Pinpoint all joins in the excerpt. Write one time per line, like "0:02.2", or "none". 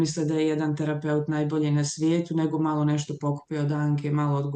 none